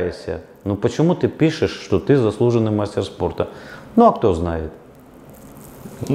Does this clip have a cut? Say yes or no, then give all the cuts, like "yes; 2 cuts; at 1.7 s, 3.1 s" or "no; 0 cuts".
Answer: no; 0 cuts